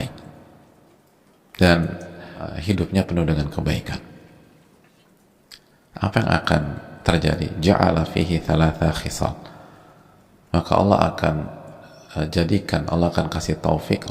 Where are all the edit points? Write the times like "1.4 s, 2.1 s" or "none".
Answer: 2.5 s